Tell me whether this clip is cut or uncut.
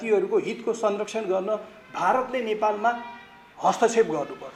uncut